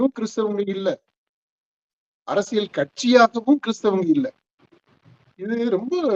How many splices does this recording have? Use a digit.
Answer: 0